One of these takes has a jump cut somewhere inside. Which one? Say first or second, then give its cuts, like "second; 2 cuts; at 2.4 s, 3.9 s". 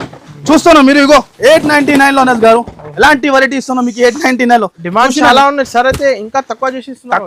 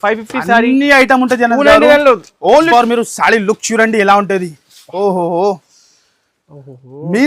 second; 1 cut; at 2.7 s